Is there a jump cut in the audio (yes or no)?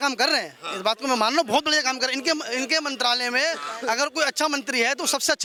no